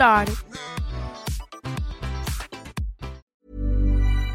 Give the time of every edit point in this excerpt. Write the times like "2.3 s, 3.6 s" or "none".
3.3 s